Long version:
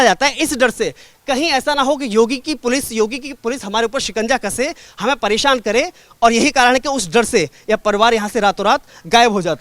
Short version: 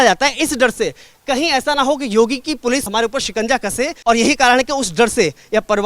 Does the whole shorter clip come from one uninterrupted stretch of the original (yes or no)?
no